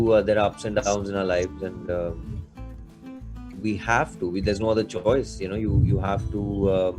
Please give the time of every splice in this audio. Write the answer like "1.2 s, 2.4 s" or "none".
none